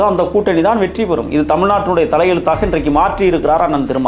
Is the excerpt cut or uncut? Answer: uncut